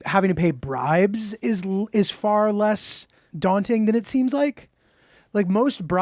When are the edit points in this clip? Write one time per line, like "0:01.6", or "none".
0:03.2